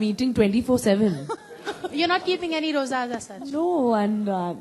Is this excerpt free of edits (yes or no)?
no